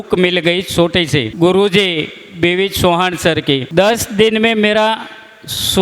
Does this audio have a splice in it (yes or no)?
yes